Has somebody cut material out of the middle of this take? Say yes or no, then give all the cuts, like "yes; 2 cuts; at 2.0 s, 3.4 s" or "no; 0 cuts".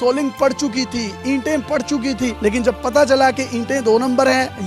no; 0 cuts